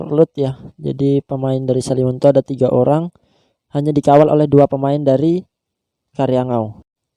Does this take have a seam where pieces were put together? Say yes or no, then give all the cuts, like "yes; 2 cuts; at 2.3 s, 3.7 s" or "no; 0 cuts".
no; 0 cuts